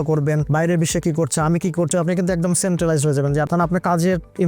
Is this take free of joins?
no; 2 cuts; at 1.9 s, 3.5 s

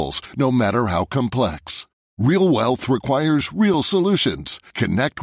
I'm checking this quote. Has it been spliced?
no; 0 cuts

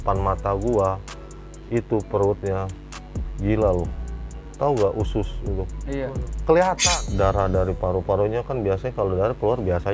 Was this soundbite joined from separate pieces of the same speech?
yes; 1 cut; at 6.8 s

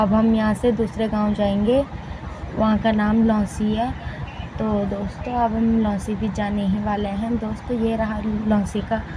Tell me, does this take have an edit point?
no; 0 cuts

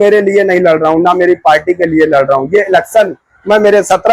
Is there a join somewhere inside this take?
no; 0 cuts

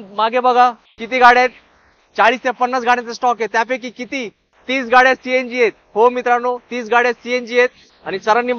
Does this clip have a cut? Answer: no; 0 cuts

